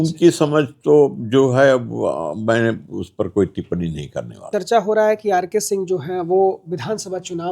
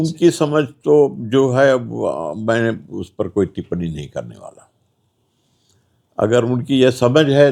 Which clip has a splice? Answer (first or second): first